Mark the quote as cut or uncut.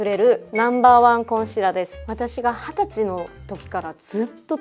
cut